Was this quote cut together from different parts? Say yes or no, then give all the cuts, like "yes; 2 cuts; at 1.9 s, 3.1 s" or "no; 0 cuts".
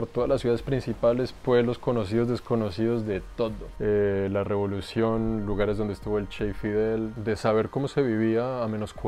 yes; 2 cuts; at 3.7 s, 7.1 s